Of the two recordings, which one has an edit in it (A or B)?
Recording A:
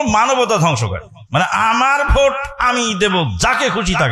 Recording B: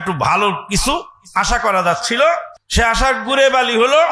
B